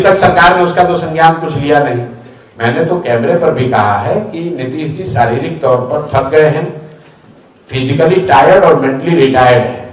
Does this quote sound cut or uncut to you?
uncut